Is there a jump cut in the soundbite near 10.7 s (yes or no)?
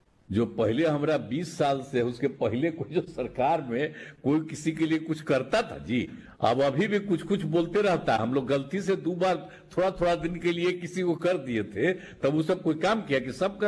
no